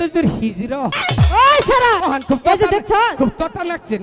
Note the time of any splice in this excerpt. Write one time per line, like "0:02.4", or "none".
0:01.0
0:02.0